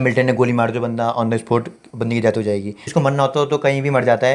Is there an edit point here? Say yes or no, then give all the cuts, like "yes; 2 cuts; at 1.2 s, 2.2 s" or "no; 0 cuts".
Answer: yes; 1 cut; at 2.9 s